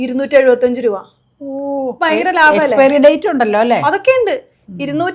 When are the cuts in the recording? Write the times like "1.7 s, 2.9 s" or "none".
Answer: none